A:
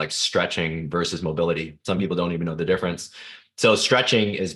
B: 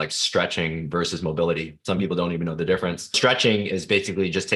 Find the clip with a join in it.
B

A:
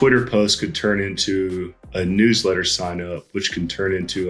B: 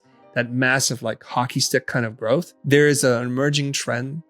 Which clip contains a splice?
B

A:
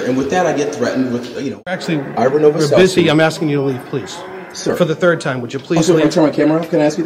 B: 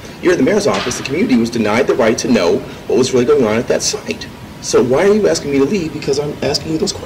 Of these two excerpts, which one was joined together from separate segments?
A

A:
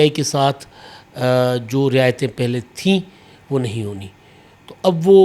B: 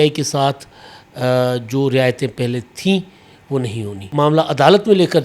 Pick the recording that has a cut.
B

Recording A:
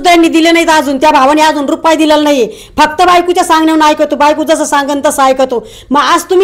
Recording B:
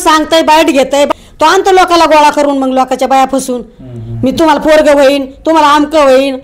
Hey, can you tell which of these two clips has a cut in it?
B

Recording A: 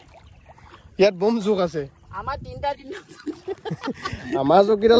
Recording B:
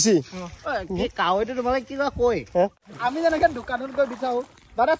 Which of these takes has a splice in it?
B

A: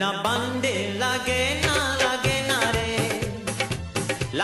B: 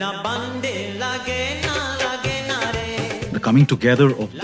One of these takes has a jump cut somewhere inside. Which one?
B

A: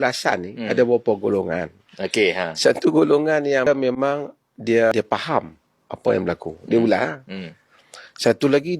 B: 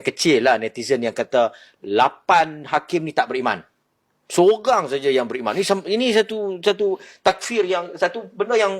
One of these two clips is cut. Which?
A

